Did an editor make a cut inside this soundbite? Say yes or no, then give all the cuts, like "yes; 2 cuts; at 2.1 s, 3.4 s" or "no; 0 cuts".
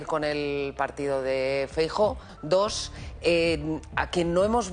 yes; 1 cut; at 2.3 s